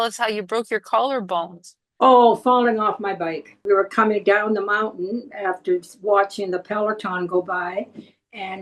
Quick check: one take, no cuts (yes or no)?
no